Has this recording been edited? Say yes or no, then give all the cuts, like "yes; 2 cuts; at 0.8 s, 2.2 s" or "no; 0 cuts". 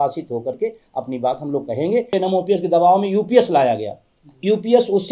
yes; 1 cut; at 2.1 s